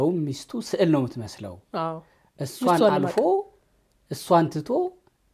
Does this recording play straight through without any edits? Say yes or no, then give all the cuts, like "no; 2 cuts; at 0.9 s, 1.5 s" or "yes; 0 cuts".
yes; 0 cuts